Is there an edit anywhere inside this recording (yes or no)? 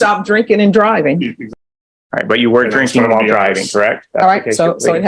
yes